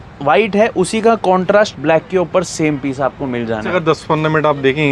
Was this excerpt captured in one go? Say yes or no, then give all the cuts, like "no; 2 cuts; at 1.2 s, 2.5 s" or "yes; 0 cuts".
no; 1 cut; at 3.7 s